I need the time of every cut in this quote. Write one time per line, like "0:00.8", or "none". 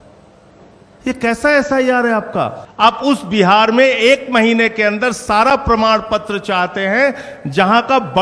0:02.6